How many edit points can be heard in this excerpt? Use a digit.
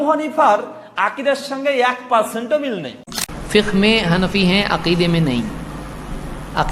1